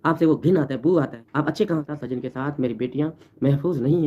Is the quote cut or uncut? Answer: cut